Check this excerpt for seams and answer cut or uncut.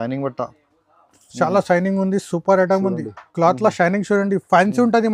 uncut